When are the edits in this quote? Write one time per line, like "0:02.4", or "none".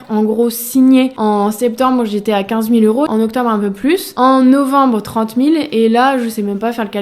0:01.1
0:03.1
0:04.1